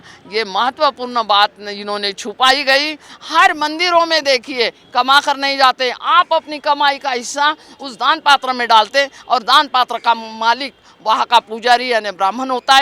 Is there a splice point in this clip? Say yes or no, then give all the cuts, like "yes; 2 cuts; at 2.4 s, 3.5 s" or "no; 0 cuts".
yes; 1 cut; at 3.1 s